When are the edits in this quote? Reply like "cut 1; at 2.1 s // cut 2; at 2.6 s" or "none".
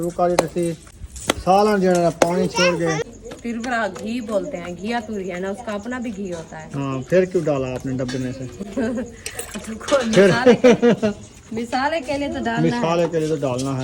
cut 1; at 3.0 s

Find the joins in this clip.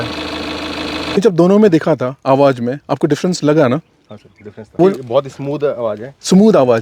cut 1; at 1.2 s // cut 2; at 4.7 s

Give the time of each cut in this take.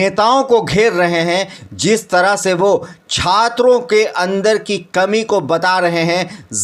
none

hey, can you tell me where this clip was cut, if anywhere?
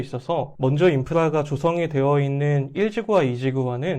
none

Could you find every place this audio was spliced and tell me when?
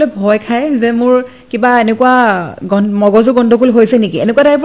none

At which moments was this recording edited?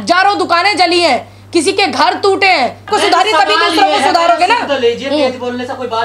cut 1; at 2.9 s

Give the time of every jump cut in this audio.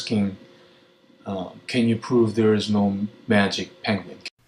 cut 1; at 2.9 s

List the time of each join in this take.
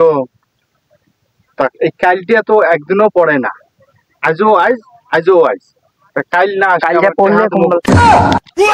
cut 1; at 7.8 s

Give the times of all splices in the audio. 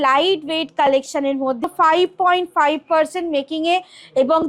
cut 1; at 1.7 s

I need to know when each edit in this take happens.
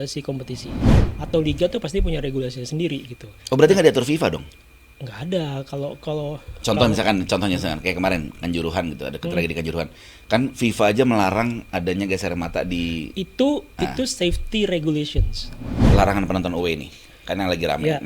cut 1; at 1.0 s // cut 2; at 15.7 s

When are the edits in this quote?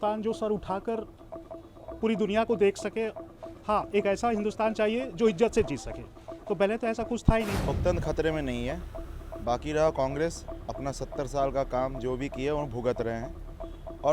cut 1; at 7.6 s

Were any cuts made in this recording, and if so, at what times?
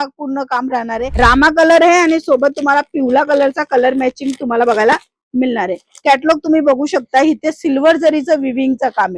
cut 1; at 1.0 s

